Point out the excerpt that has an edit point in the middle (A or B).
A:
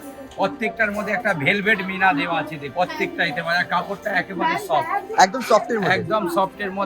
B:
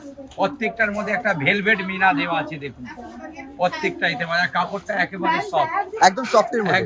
A